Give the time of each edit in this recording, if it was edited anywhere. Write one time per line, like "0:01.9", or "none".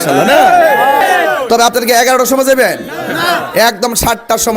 0:01.0